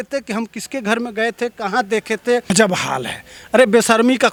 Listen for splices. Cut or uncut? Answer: uncut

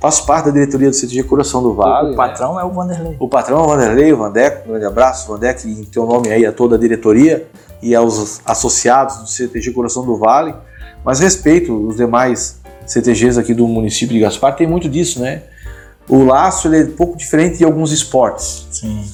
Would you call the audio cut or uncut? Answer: uncut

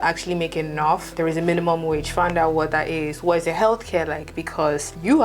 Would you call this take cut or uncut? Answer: uncut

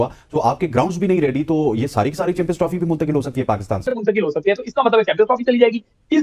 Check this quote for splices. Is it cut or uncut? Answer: cut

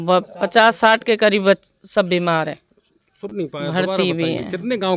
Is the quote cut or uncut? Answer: uncut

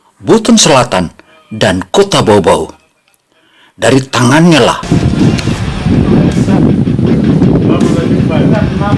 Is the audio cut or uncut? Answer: cut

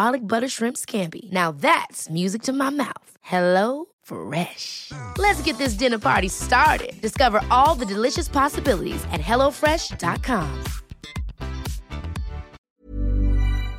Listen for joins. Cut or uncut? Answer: cut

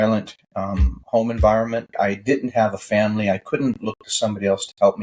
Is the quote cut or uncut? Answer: cut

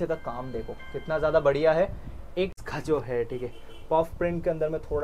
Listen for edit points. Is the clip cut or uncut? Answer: cut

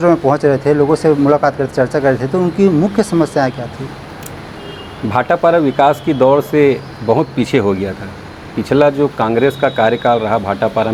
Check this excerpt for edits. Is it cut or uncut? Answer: uncut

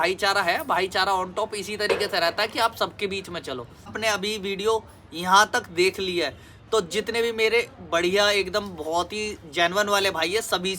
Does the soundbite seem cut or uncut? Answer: cut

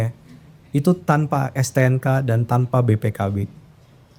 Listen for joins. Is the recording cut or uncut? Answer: uncut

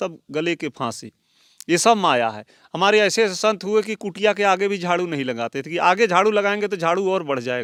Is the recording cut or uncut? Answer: uncut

